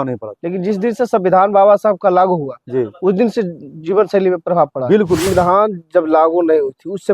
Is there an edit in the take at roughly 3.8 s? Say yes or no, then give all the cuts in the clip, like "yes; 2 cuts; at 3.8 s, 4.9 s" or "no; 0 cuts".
no; 1 cut; at 5.2 s